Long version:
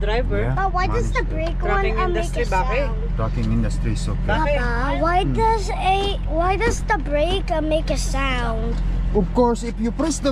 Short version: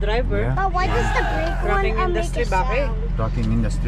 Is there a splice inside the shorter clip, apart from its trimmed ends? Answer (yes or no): no